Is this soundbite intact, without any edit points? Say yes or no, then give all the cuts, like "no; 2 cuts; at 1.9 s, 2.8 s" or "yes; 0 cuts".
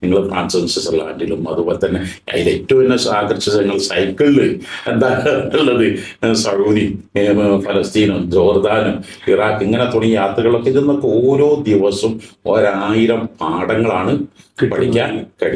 yes; 0 cuts